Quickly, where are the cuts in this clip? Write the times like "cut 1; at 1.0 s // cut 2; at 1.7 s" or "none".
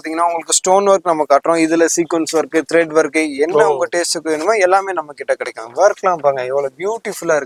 none